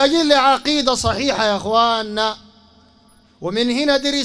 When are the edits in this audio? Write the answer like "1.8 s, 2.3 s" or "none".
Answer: none